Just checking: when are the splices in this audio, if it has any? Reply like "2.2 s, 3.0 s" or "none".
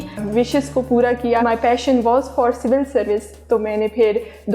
1.4 s